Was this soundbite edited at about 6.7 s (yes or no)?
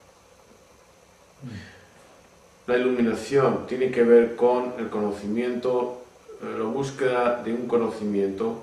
yes